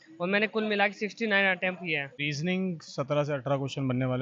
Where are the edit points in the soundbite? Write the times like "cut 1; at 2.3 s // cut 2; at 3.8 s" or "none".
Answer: cut 1; at 2.2 s